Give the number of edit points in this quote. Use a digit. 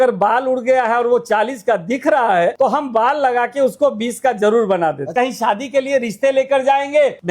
2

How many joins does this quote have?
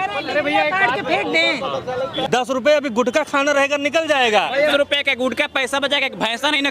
2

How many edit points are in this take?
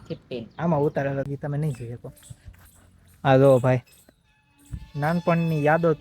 1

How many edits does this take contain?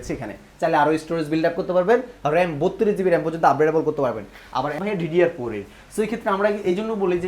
1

